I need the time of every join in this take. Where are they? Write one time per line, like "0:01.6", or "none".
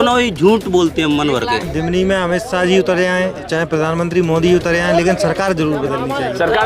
0:01.7